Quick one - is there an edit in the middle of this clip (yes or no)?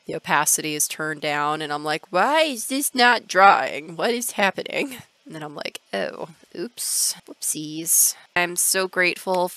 no